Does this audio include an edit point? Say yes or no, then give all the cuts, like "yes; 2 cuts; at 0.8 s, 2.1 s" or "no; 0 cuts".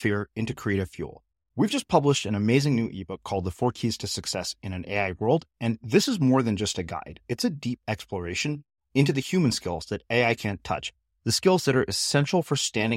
no; 0 cuts